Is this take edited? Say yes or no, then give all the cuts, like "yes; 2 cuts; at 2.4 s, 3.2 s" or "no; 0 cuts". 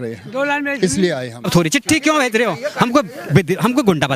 yes; 1 cut; at 1.3 s